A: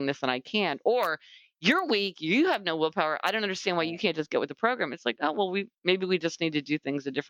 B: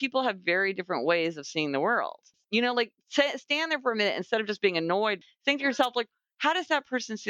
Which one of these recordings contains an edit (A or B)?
B